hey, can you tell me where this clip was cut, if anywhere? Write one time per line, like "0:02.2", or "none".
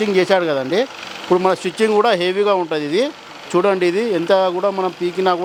none